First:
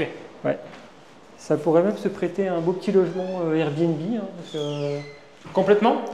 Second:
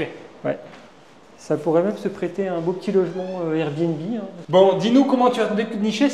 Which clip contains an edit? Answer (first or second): second